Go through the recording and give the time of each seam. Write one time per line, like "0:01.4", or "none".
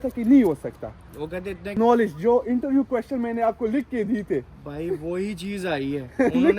0:01.8